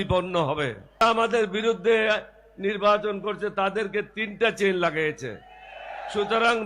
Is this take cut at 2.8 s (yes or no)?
no